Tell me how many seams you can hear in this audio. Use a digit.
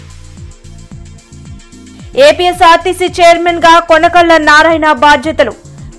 1